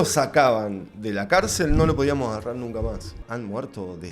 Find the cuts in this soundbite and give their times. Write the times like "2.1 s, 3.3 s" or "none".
3.2 s

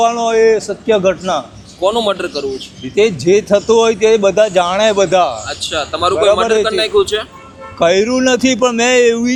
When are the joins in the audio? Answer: none

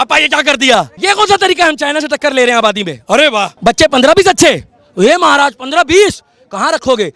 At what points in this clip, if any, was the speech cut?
0.9 s, 3.5 s

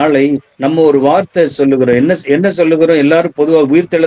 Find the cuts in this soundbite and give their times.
none

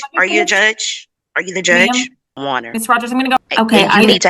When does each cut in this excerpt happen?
3.4 s

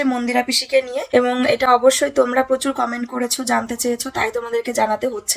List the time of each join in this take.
none

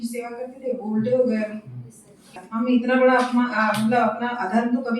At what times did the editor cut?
2.3 s

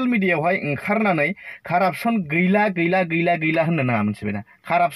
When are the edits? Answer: none

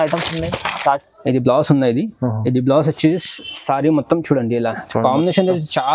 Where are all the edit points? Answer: 1.0 s

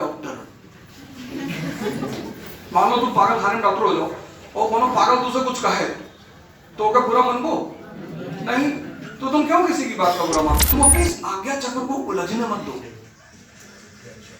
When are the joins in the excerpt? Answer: 10.6 s

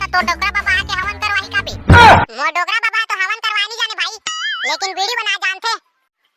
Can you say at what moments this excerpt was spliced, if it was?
1.7 s, 2.3 s

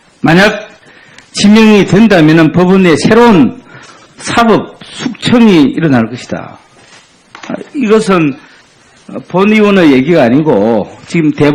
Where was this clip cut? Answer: none

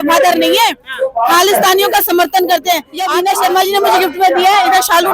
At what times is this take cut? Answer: 3.0 s

